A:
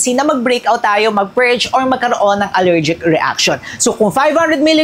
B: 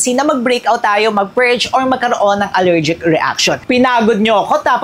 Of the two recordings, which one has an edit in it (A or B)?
B